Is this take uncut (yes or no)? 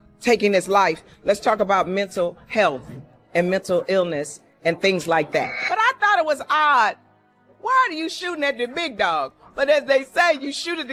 yes